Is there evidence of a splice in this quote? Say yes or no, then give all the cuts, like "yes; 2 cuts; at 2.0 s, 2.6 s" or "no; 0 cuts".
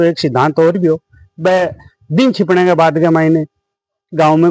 no; 0 cuts